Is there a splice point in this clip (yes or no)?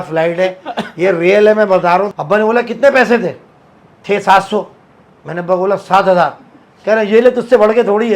yes